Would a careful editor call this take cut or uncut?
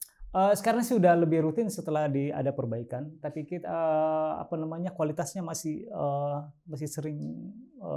uncut